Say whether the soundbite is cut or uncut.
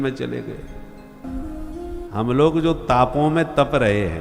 cut